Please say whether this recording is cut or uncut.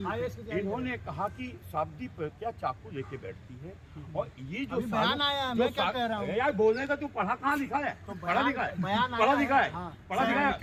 uncut